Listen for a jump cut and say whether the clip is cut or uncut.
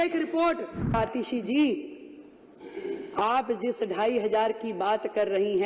cut